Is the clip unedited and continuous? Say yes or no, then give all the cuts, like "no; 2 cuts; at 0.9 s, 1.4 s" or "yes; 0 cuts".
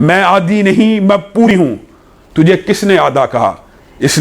no; 1 cut; at 1.5 s